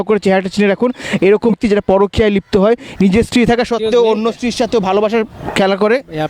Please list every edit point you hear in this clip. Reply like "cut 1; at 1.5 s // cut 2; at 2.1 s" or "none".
cut 1; at 1.5 s